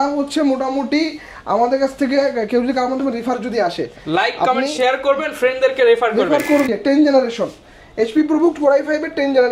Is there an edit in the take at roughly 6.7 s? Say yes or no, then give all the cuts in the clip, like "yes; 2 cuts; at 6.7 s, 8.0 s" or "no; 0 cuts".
yes; 1 cut; at 6.7 s